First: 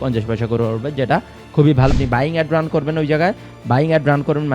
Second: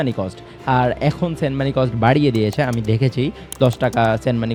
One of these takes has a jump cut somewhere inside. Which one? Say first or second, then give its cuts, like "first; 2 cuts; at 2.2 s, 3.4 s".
first; 1 cut; at 1.9 s